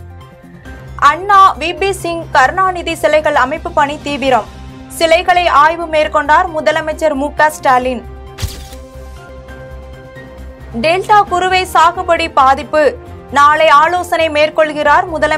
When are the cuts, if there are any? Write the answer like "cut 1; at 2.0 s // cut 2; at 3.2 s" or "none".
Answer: cut 1; at 0.9 s